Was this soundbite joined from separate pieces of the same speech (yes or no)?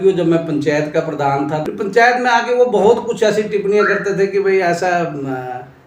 yes